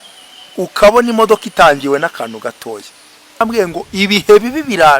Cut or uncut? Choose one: cut